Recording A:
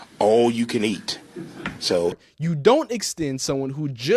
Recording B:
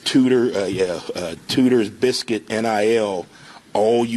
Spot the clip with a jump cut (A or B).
A